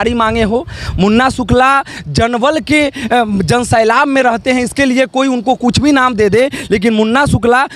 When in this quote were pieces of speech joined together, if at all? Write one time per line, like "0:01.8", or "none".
none